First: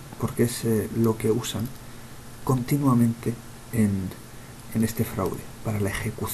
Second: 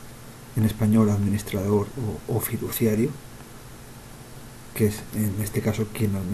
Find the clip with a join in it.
first; 1 cut; at 4.1 s

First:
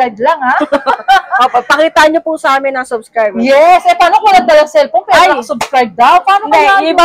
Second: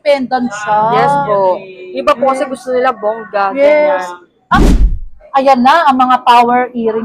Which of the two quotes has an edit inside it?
second; 1 cut; at 4.6 s

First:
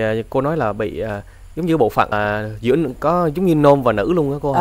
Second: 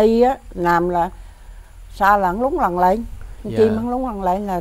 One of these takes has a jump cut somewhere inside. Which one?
first; 1 cut; at 2.1 s

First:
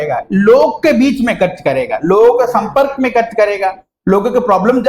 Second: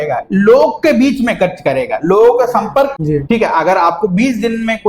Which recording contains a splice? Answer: second; 1 cut; at 2.9 s

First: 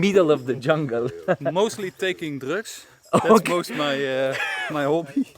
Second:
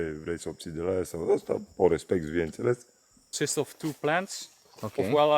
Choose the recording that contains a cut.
second; 1 cut; at 3.2 s

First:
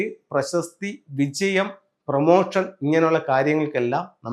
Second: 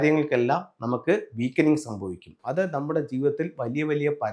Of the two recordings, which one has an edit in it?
second; 1 cut; at 2.3 s

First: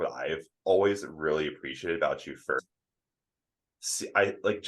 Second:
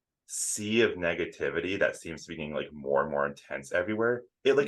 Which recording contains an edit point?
first; 1 cut; at 2.6 s

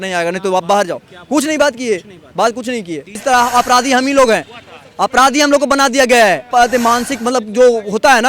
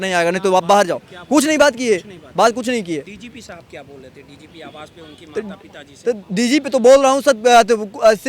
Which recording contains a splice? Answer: first; 2 cuts; at 3.1 s, 6.4 s

